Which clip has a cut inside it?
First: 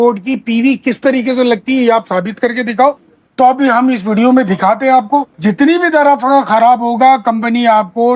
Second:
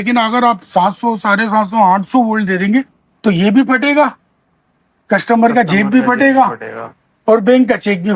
first; 1 cut; at 5.3 s

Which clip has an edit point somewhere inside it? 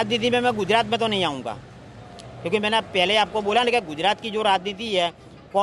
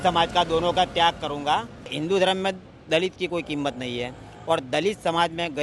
second; 1 cut; at 1.9 s

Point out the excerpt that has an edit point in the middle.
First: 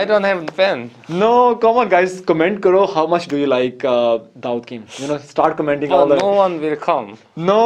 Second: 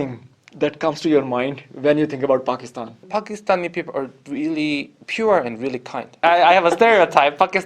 second; 2 cuts; at 3.0 s, 6.2 s

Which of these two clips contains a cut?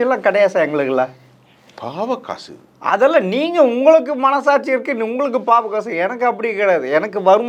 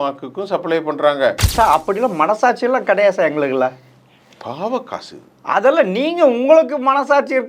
second; 1 cut; at 1.4 s

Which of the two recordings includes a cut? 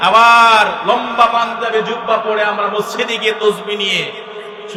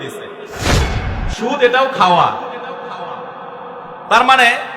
second; 1 cut; at 0.9 s

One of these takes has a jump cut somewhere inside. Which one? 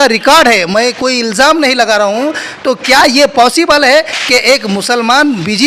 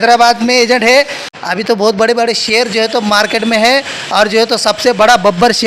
second; 1 cut; at 1.3 s

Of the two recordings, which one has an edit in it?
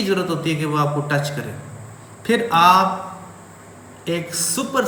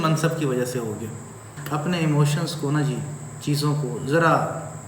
second; 1 cut; at 1.5 s

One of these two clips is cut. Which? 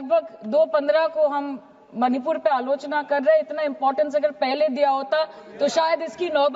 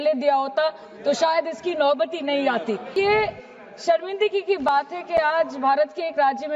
second; 1 cut; at 2.9 s

